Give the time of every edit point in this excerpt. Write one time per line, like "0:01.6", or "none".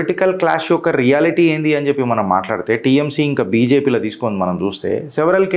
none